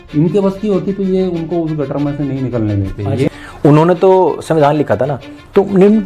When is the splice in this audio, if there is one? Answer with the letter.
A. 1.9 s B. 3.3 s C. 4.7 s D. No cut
B